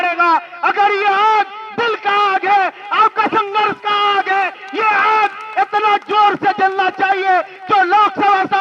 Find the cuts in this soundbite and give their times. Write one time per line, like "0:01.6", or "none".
none